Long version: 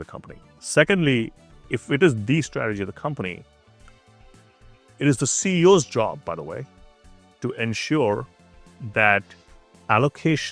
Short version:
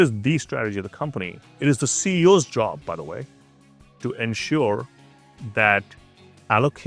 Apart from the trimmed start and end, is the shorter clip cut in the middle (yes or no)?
yes